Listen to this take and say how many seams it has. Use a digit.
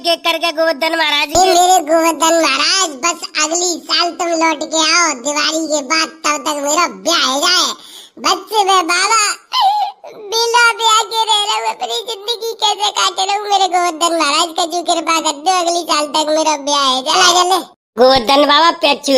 2